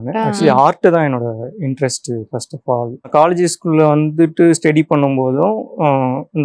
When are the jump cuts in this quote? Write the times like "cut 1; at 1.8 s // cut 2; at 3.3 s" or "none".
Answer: cut 1; at 3.1 s